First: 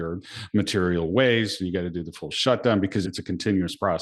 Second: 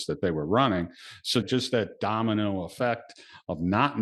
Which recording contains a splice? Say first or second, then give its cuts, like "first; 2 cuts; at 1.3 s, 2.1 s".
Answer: first; 1 cut; at 3.1 s